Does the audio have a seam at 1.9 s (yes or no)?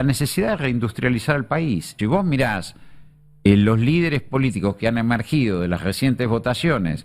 yes